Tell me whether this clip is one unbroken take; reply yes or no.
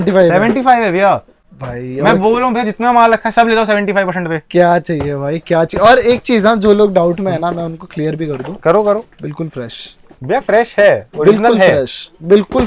yes